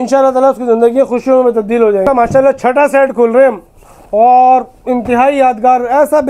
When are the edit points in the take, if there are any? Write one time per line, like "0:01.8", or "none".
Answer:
0:02.0